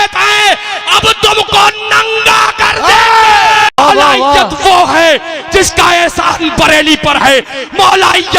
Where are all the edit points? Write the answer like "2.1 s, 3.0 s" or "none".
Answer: 3.8 s